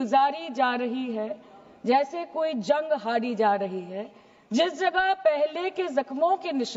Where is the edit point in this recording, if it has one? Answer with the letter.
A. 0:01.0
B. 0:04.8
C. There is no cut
C